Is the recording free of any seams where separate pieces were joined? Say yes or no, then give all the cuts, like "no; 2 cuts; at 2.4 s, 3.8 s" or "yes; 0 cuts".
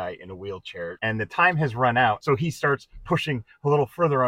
no; 2 cuts; at 0.9 s, 2.2 s